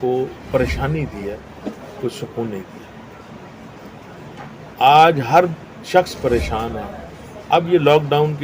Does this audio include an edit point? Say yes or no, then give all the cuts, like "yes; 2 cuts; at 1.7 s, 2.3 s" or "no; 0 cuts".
no; 0 cuts